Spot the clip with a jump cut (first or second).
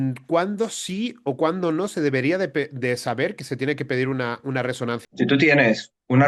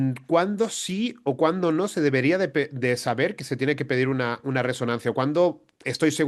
first